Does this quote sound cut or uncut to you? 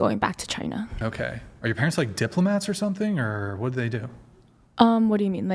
uncut